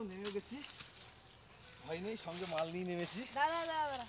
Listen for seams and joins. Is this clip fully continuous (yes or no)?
yes